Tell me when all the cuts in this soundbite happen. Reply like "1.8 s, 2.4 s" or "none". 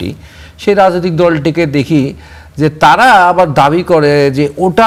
none